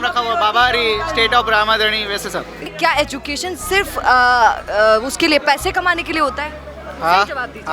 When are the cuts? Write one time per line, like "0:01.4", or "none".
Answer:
0:02.7